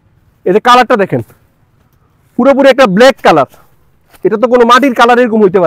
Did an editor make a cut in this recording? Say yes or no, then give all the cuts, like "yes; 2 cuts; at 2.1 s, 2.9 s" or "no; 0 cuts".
no; 0 cuts